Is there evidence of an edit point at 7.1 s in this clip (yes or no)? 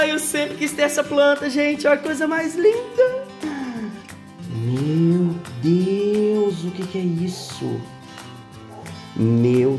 no